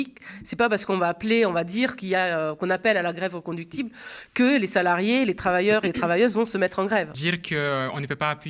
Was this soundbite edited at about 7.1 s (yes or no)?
yes